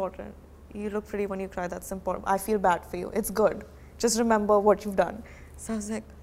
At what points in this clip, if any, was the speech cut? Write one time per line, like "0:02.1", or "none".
none